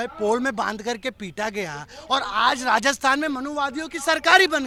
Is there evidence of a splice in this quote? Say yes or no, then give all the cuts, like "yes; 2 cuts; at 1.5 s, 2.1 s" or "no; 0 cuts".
no; 0 cuts